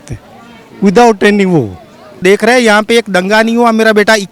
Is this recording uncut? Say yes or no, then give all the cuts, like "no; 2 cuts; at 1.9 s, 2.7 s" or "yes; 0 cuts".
no; 1 cut; at 2.2 s